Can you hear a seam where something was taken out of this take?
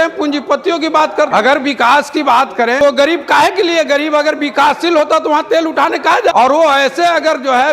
yes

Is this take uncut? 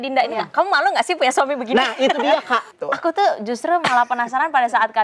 no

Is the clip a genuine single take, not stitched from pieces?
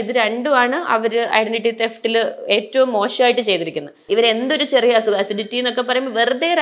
no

